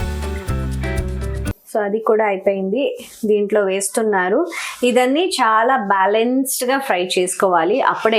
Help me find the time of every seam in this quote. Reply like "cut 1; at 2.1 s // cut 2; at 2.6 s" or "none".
cut 1; at 1.5 s